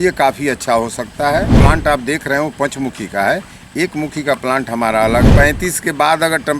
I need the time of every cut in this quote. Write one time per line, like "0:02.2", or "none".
0:01.6
0:05.3